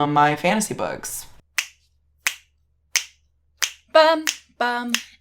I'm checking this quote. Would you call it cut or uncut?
cut